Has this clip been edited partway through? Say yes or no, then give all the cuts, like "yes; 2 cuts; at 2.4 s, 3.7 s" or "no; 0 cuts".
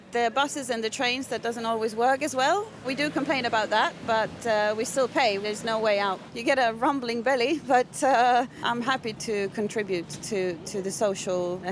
yes; 4 cuts; at 2.9 s, 5.4 s, 6.3 s, 9.1 s